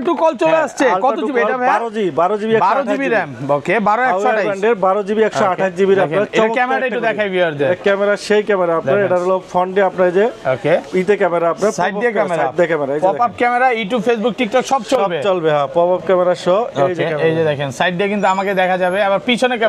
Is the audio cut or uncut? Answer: uncut